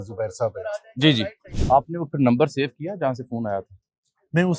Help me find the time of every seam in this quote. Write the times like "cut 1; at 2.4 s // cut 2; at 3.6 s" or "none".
cut 1; at 1.5 s